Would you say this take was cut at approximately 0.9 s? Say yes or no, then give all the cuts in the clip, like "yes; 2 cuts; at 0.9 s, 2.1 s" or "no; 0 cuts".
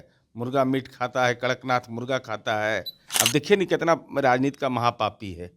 no; 1 cut; at 3.0 s